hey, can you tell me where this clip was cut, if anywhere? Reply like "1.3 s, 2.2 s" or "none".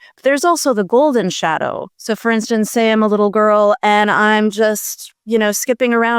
none